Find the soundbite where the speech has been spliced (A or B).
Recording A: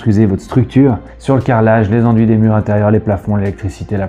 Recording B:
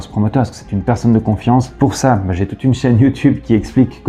A